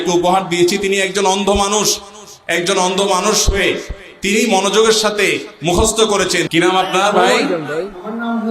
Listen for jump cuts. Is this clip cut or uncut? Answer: cut